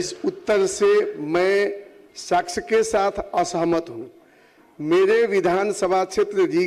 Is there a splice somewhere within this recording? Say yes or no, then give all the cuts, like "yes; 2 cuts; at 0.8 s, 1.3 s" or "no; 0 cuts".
no; 0 cuts